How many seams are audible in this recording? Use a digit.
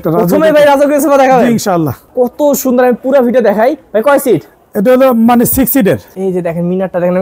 2